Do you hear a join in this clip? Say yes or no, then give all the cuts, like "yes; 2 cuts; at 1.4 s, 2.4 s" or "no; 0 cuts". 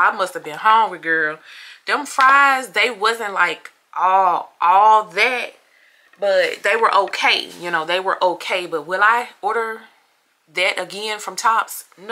no; 0 cuts